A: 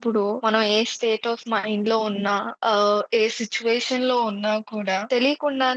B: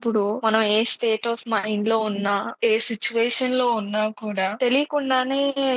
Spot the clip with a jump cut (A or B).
B